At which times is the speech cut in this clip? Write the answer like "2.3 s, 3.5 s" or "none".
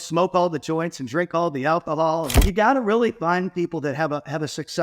2.3 s